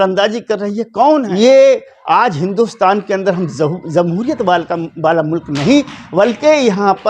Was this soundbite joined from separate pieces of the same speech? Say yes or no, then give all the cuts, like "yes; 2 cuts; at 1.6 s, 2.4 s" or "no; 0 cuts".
yes; 1 cut; at 1.3 s